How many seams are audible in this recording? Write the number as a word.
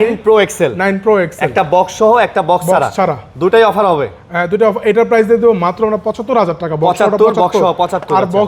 zero